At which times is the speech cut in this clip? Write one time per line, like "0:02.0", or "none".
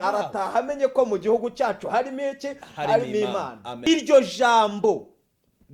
0:03.6